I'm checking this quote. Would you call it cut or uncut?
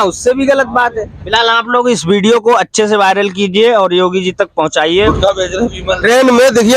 cut